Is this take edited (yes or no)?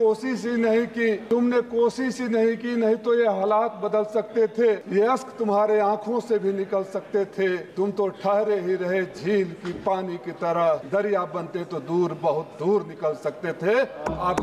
yes